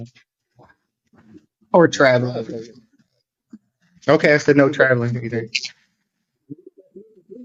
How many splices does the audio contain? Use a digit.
0